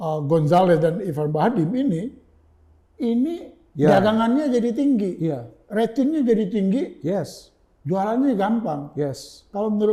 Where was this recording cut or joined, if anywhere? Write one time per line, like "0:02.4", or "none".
none